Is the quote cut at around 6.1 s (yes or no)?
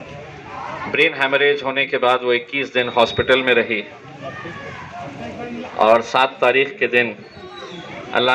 no